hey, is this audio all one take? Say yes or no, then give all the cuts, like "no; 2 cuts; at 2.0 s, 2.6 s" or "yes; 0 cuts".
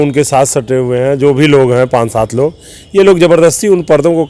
yes; 0 cuts